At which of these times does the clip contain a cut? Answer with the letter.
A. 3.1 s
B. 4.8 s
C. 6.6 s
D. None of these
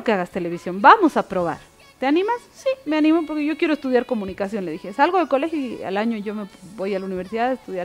D